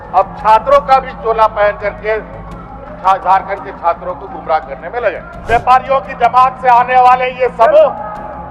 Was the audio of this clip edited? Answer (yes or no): yes